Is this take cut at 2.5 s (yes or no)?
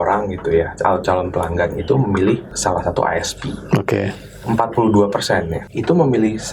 yes